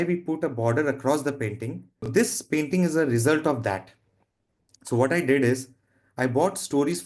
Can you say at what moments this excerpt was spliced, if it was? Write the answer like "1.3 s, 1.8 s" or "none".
2.1 s